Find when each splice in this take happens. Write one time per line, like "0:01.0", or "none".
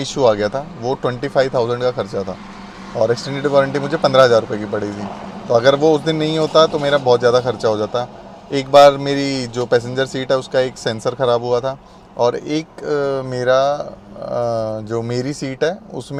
none